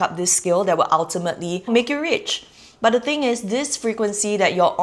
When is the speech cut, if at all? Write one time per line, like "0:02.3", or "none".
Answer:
0:01.7